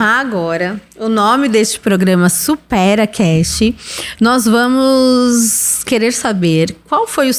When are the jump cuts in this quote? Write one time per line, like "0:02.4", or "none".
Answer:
none